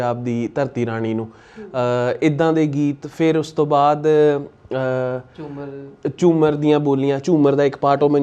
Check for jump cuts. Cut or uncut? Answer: uncut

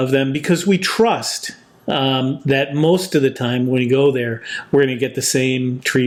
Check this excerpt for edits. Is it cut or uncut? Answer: uncut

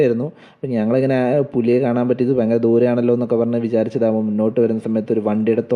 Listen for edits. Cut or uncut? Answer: uncut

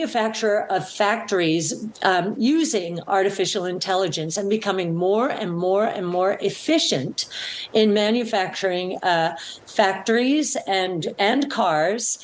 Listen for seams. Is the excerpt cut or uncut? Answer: uncut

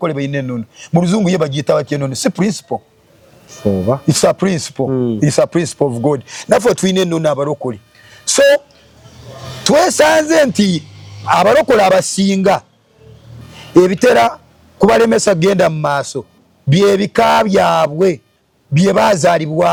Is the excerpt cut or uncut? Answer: uncut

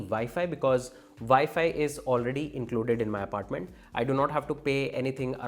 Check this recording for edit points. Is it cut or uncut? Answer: uncut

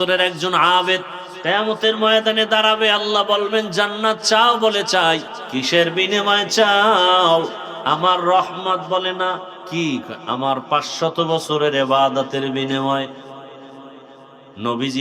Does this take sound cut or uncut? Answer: cut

